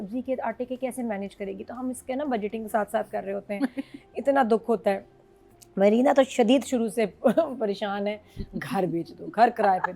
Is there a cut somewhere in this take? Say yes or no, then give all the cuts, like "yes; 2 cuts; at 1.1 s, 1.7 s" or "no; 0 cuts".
no; 0 cuts